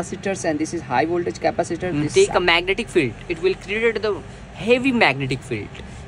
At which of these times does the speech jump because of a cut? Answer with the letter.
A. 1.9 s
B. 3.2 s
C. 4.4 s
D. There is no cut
A